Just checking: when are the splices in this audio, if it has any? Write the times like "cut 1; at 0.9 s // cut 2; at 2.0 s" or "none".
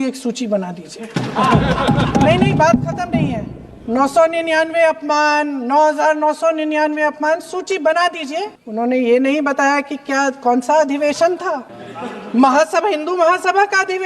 cut 1; at 8.6 s